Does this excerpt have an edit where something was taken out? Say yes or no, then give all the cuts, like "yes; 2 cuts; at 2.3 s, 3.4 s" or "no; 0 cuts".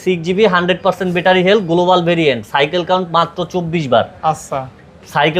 no; 0 cuts